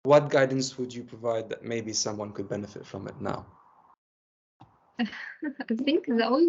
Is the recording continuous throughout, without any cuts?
yes; 0 cuts

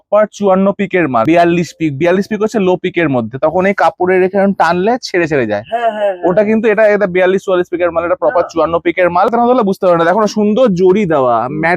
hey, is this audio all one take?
no; 2 cuts; at 1.2 s, 9.3 s

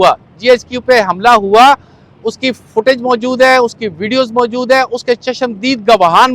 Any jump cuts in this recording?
no; 0 cuts

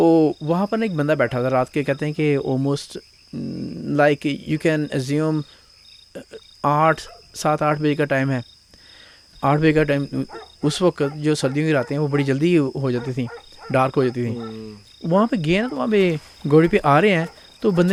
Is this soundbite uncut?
yes; 0 cuts

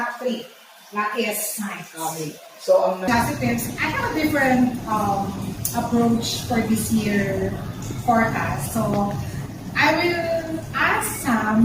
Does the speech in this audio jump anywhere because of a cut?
yes; 1 cut; at 3.1 s

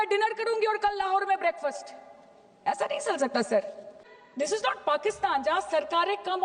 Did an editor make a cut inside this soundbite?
yes; 1 cut; at 4.2 s

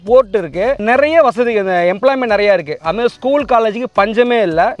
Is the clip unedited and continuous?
yes; 0 cuts

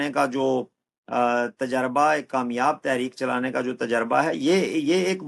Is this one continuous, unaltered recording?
yes; 0 cuts

